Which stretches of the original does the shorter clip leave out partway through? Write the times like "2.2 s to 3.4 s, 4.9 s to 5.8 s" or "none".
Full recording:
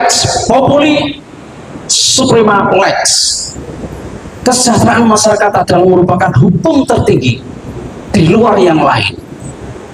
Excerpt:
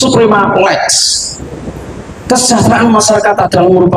none